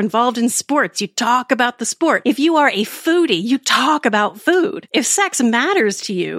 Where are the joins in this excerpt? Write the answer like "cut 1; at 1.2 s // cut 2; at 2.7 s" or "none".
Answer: cut 1; at 2.2 s // cut 2; at 4.8 s